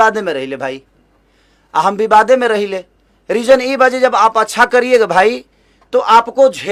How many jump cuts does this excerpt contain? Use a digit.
0